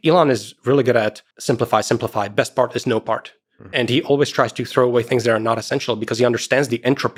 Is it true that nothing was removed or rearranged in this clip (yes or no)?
yes